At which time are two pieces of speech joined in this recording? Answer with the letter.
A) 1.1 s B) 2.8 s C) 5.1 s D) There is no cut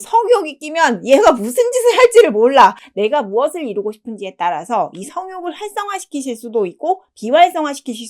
B